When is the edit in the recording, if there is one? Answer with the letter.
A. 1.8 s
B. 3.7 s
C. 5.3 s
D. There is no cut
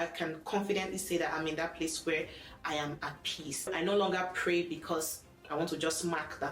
B